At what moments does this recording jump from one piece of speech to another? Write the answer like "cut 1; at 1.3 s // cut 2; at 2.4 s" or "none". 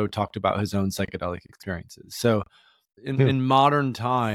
cut 1; at 2.9 s